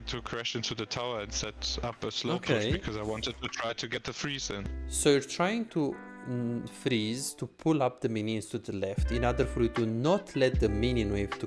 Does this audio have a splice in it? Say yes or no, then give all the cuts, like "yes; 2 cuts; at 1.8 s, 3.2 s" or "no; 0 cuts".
yes; 1 cut; at 4.8 s